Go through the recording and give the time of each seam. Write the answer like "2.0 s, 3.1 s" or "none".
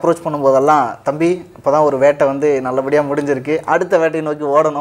none